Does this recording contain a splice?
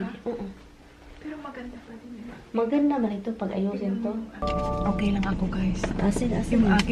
yes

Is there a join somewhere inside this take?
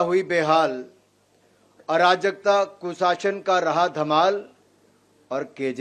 no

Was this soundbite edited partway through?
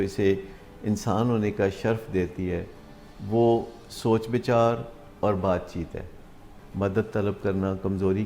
yes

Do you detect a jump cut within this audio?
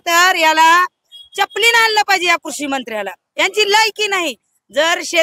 no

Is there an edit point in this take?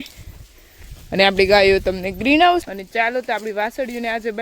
yes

